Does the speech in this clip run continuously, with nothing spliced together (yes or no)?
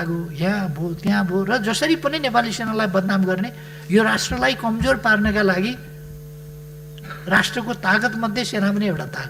yes